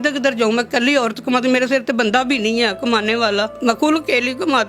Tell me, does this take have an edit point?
yes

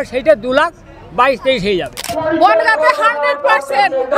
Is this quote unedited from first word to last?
no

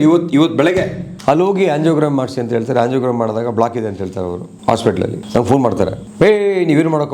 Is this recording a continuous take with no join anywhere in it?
no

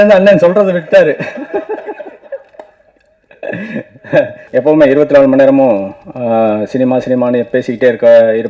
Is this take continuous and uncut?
no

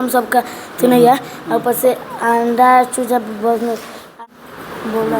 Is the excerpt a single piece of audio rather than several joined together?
no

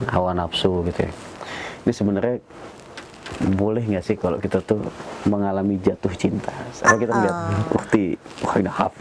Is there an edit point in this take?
no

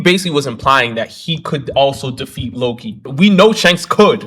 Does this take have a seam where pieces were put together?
no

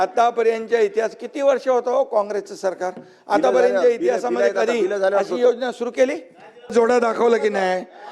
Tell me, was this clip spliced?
yes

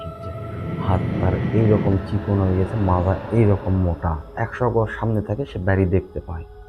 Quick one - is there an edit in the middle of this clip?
yes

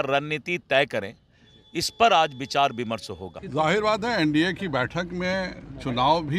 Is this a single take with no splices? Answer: no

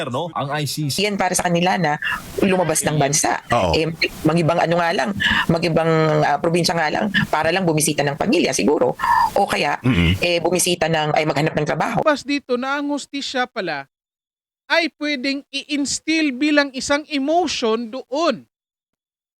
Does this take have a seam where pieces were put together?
yes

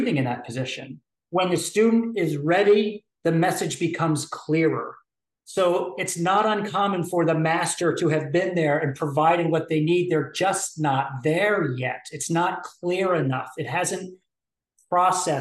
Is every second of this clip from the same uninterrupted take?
no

